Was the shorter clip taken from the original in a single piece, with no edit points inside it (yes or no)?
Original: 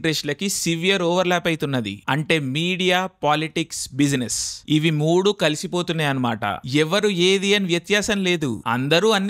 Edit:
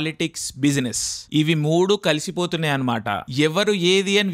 yes